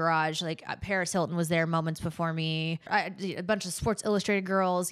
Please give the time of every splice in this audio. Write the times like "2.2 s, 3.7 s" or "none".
2.9 s